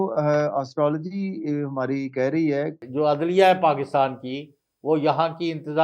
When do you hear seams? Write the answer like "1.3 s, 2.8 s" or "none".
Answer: 2.8 s